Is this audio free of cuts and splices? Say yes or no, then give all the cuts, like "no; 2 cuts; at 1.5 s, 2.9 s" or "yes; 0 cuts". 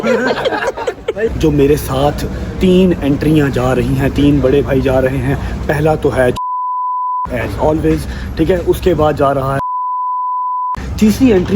no; 1 cut; at 1.3 s